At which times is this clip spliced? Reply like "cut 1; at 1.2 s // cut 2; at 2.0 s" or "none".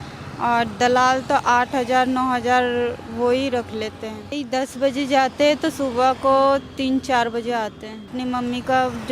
cut 1; at 4.3 s // cut 2; at 8.2 s

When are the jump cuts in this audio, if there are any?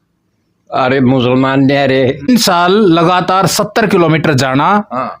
cut 1; at 2.2 s

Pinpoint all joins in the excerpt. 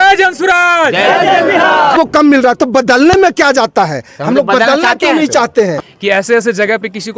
cut 1; at 2.0 s // cut 2; at 5.9 s

